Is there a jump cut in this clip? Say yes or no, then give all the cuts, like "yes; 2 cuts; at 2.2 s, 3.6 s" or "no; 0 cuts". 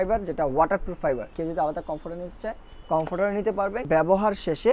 yes; 2 cuts; at 1.3 s, 3.8 s